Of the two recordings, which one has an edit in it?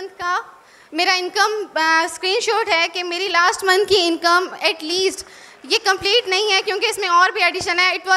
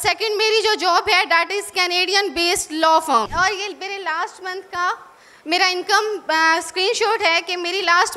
second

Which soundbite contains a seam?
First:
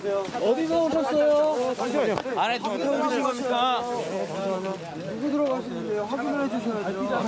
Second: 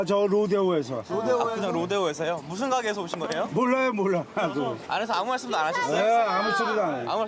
second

